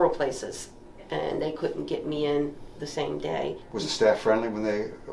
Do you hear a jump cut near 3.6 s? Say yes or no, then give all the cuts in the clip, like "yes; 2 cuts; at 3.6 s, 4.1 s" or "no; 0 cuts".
yes; 1 cut; at 3.6 s